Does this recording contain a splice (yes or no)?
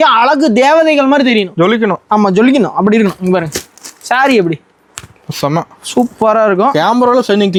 no